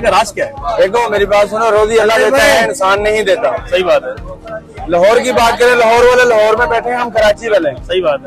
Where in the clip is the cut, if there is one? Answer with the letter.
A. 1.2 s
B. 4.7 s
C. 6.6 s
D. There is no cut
D